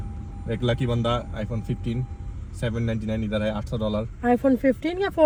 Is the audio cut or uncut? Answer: uncut